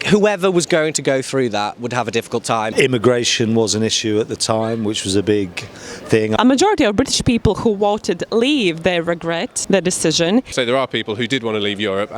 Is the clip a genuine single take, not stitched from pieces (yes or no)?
no